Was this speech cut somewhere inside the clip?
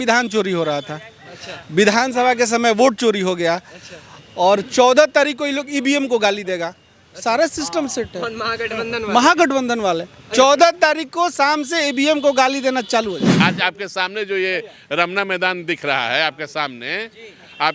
yes; 1 cut; at 13.3 s

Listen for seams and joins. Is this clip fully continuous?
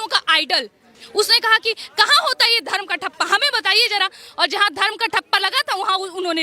no; 1 cut; at 0.9 s

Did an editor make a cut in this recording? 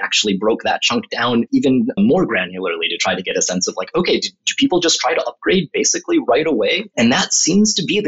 yes; 2 cuts; at 1.8 s, 6.9 s

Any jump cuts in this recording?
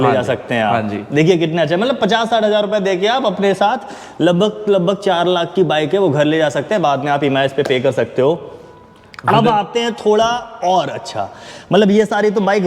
no; 0 cuts

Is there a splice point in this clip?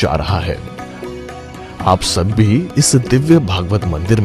no; 0 cuts

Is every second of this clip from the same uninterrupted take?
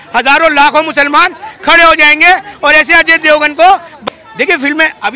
no; 1 cut; at 3.9 s

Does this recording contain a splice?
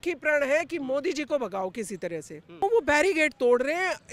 yes; 1 cut; at 2.6 s

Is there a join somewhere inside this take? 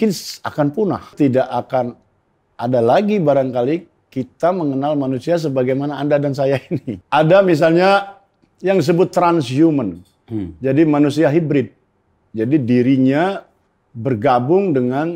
yes; 2 cuts; at 1.1 s, 7.0 s

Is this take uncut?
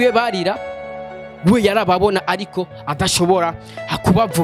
yes; 0 cuts

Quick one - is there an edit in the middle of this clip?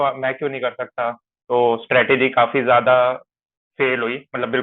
yes; 1 cut; at 1.3 s

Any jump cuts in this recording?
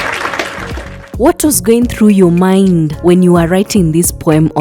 no; 0 cuts

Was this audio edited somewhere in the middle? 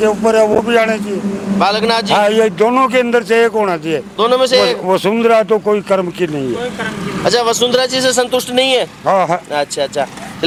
no; 0 cuts

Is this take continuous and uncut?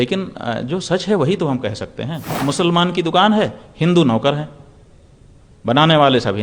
no; 1 cut; at 2.3 s

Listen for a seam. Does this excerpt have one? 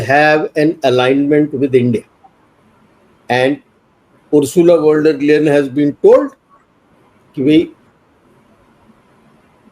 no; 0 cuts

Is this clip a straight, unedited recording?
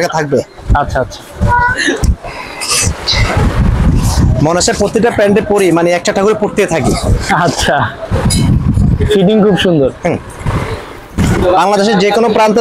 yes; 0 cuts

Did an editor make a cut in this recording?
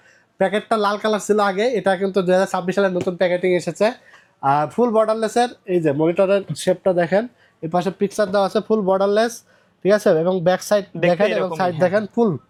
no; 0 cuts

